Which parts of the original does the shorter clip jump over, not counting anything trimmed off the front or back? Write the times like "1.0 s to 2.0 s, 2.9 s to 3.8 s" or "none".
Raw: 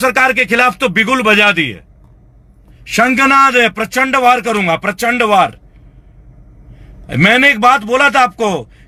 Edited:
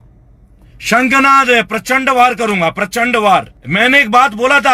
5.7 s to 7.1 s